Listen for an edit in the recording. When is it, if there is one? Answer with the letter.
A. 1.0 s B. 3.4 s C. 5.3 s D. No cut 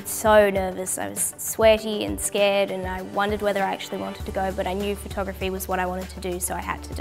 C